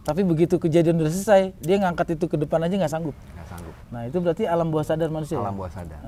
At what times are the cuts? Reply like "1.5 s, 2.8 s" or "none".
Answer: none